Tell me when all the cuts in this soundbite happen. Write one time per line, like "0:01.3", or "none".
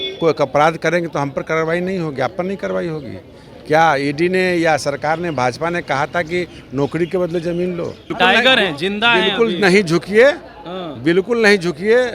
0:08.1